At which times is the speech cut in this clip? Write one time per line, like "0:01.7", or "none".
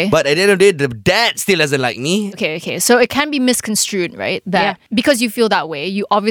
0:04.8